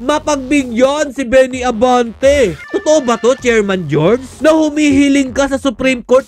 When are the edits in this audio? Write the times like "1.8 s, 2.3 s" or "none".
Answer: 2.7 s, 4.3 s